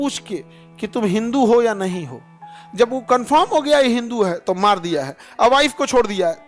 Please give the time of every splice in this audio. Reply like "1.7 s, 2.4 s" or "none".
none